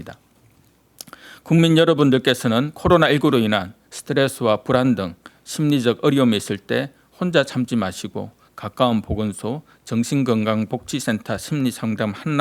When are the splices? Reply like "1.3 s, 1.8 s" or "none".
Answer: none